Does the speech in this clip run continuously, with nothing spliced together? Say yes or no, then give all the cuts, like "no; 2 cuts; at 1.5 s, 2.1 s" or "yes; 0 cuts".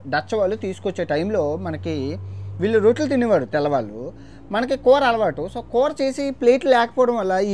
yes; 0 cuts